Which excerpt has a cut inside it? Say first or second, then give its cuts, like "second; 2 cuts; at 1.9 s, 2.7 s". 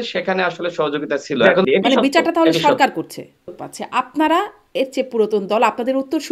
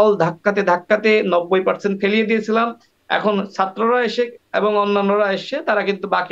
first; 2 cuts; at 1.6 s, 3.7 s